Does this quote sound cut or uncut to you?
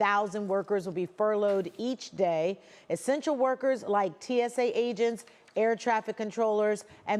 uncut